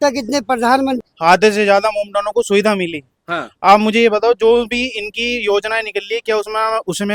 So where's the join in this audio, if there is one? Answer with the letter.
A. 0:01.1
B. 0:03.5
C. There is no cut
A